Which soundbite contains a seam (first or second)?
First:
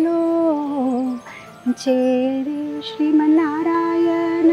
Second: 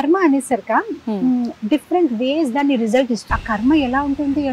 second